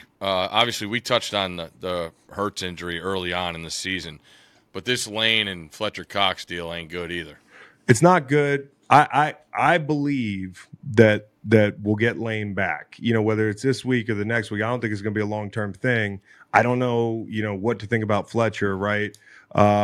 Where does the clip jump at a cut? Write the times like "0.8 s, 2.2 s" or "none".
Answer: none